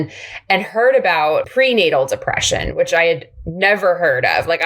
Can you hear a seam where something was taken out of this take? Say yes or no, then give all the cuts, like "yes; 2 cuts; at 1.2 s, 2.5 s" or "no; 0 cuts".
yes; 1 cut; at 1.5 s